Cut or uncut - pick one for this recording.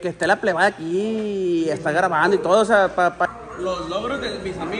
cut